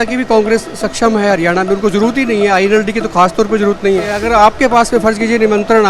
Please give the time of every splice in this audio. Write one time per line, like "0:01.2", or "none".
0:04.2